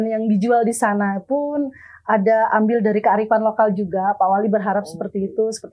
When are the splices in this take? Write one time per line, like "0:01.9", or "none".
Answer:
none

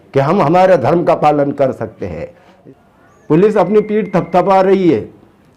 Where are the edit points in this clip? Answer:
0:02.5

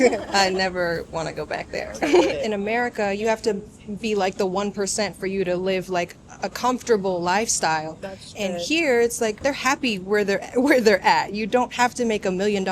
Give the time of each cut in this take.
0:02.4
0:09.4

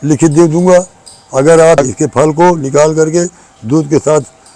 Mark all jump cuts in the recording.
0:01.9

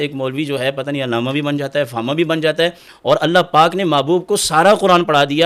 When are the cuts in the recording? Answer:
none

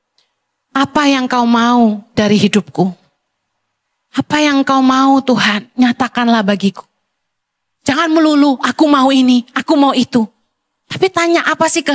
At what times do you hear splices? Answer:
none

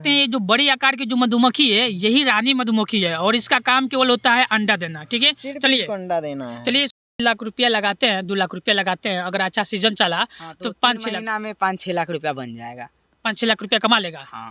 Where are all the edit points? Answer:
0:07.1

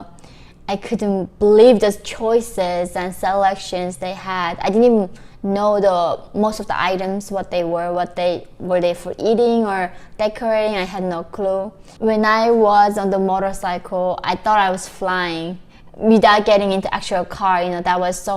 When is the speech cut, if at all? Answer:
0:11.8

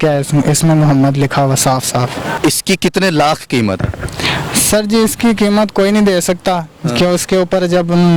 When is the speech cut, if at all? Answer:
0:02.2

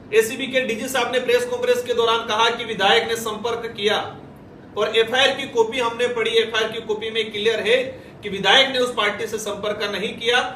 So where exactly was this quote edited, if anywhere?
none

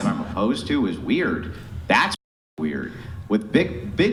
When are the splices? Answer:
none

